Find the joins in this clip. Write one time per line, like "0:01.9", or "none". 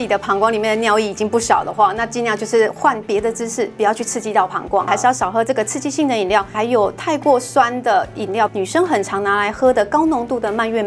0:04.9
0:06.5
0:08.5